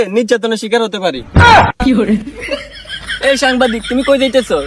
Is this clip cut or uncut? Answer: uncut